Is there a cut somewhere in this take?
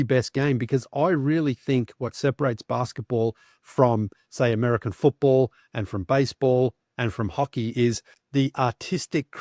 yes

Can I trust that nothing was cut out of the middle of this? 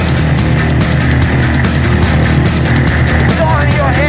yes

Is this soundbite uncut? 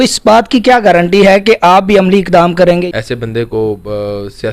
no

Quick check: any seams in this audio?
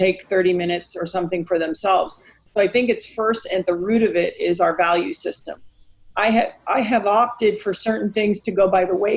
no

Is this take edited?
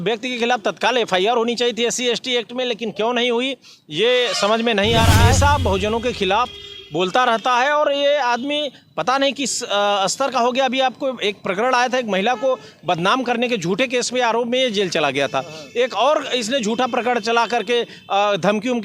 yes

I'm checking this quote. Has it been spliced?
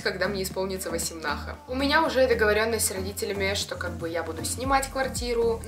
no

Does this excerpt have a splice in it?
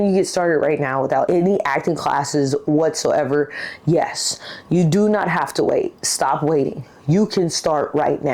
yes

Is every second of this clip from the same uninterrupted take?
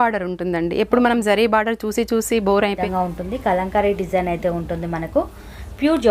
no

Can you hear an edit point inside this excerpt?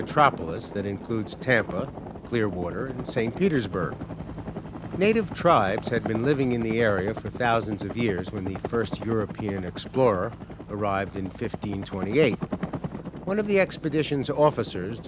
no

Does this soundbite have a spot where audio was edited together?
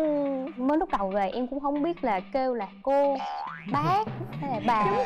no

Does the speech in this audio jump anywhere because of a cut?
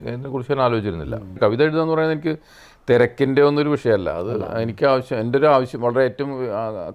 yes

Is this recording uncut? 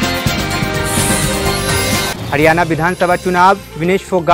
no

